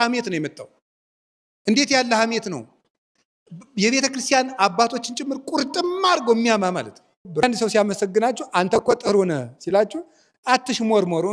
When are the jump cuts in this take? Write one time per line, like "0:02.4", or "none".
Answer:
0:07.3